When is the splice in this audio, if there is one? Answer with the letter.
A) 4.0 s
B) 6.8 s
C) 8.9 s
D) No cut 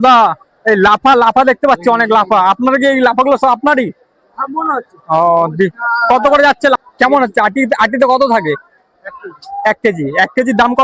B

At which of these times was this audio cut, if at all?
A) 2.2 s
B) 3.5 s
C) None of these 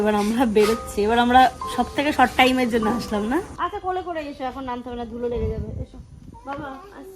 B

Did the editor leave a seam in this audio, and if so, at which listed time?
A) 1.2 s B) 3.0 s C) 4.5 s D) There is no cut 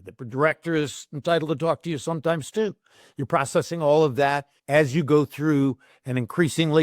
C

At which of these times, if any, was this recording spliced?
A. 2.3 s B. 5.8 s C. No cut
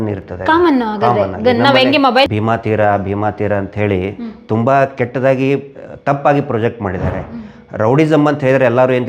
A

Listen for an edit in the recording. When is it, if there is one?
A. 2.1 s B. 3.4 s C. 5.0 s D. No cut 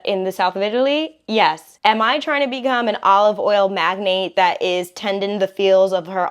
A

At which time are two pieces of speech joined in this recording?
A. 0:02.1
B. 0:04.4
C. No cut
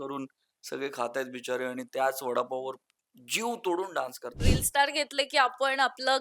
B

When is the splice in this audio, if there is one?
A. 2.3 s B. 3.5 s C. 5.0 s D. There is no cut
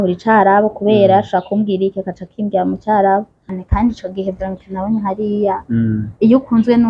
B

